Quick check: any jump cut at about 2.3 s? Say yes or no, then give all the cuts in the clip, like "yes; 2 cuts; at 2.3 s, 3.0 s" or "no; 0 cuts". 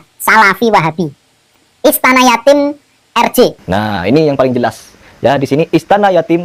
no; 1 cut; at 3.6 s